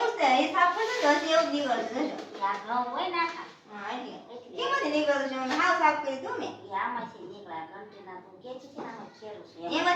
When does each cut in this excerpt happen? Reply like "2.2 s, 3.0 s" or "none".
none